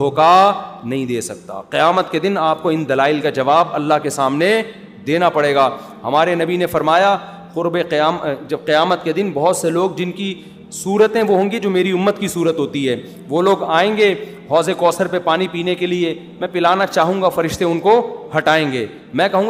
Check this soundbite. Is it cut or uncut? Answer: uncut